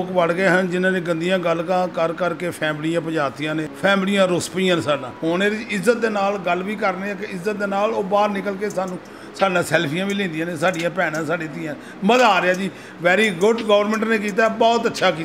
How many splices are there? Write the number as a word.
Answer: two